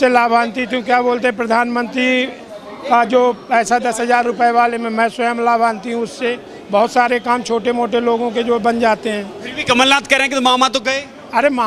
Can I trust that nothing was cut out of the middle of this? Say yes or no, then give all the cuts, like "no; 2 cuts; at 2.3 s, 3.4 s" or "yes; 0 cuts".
yes; 0 cuts